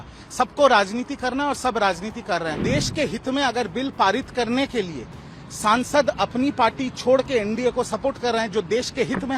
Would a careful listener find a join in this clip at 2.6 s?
yes; 1 cut; at 2.6 s

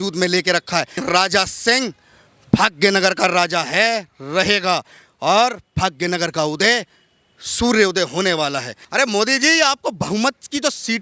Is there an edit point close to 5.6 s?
no; 2 cuts; at 1.0 s, 8.8 s

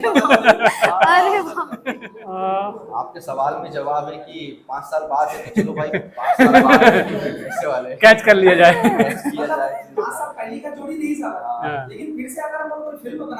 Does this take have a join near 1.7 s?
yes; 1 cut; at 1.7 s

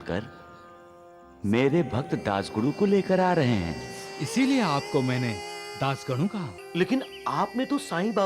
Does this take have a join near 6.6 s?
yes; 1 cut; at 6.6 s

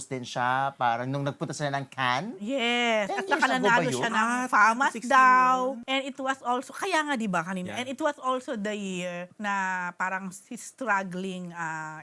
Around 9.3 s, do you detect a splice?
yes; 2 cuts; at 5.8 s, 9.3 s

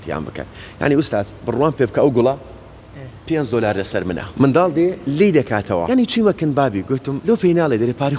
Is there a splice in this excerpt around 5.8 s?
yes; 3 cuts; at 4.3 s, 5.8 s, 7.1 s

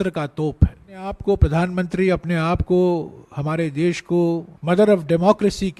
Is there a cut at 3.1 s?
no; 2 cuts; at 1.2 s, 4.5 s

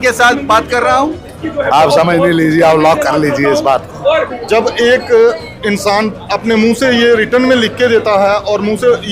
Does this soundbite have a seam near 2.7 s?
no; 1 cut; at 4.4 s

